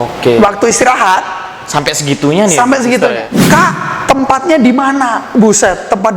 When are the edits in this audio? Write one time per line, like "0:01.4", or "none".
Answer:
0:03.3